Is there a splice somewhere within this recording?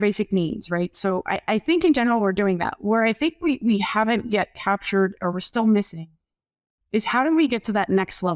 no; 0 cuts

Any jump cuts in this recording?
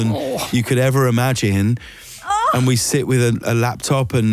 no; 0 cuts

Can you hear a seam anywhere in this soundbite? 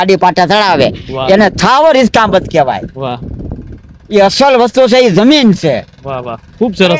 no; 0 cuts

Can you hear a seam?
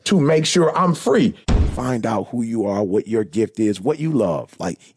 yes; 1 cut; at 1.5 s

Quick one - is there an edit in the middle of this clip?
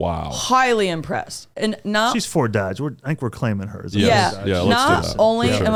no; 0 cuts

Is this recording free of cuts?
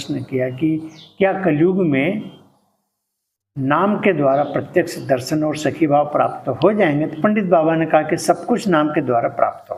yes; 0 cuts

